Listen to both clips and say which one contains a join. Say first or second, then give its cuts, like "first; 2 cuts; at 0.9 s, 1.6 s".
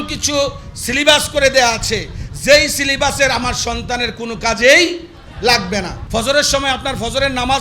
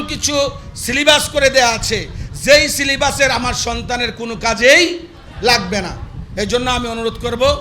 first; 1 cut; at 6.0 s